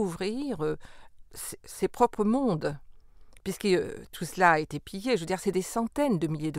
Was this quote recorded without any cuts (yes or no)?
yes